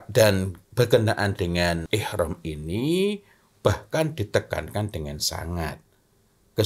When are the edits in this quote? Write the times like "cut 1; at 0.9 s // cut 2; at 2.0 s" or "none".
cut 1; at 1.8 s